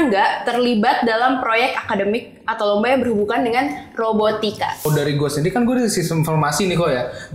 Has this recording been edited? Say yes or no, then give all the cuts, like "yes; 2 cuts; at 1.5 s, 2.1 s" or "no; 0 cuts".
yes; 1 cut; at 4.9 s